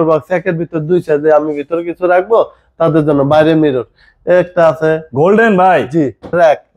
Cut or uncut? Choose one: uncut